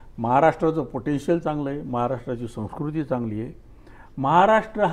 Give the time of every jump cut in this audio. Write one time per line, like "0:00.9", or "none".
none

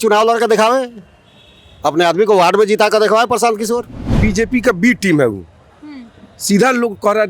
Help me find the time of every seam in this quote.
0:04.0

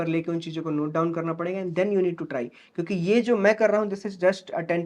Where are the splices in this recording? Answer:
none

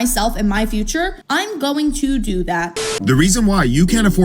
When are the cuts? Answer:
0:02.8

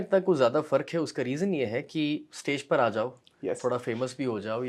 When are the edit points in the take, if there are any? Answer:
none

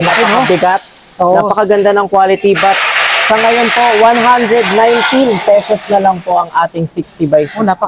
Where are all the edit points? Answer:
none

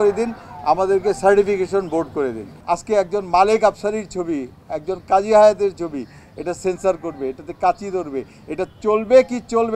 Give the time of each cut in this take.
0:02.5

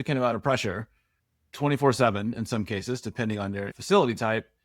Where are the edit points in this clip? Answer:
0:03.7

